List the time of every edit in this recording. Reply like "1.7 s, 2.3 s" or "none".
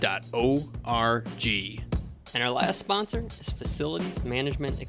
1.7 s